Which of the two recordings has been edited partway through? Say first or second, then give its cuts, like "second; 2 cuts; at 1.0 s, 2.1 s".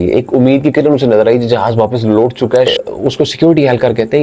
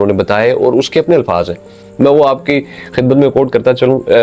first; 1 cut; at 2.7 s